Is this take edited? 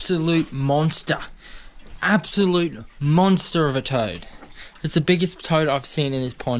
no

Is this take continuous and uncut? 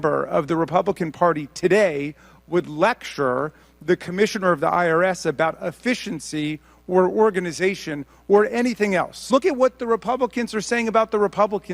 no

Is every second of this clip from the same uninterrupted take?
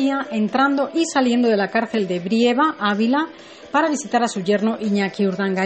no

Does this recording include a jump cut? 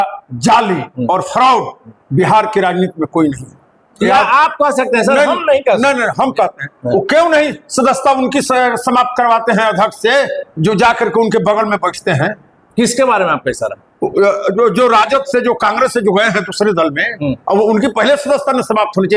no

